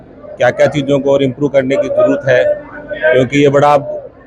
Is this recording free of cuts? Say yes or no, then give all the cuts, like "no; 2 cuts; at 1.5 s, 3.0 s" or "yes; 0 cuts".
yes; 0 cuts